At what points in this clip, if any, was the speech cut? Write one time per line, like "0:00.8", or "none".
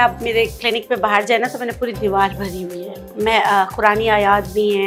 none